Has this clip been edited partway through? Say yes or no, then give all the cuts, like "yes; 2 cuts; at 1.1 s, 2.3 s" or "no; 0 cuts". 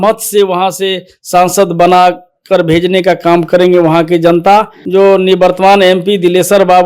yes; 1 cut; at 4.8 s